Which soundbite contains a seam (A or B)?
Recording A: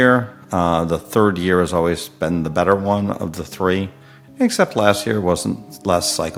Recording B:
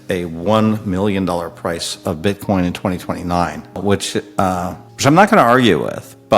B